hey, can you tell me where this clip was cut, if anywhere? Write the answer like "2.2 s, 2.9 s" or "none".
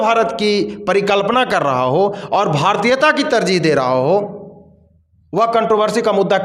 none